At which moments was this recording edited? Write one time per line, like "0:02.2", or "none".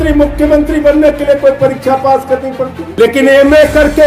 0:02.8